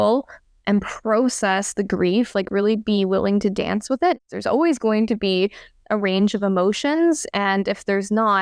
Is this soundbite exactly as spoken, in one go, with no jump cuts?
no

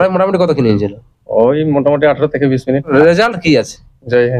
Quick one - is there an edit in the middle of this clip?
yes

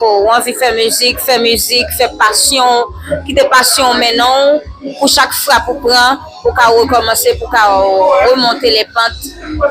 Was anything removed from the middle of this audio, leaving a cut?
no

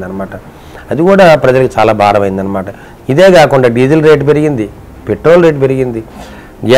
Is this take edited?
no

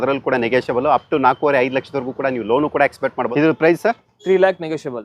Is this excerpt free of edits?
no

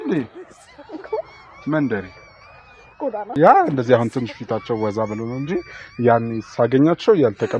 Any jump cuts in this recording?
yes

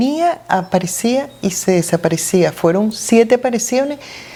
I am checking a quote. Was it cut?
no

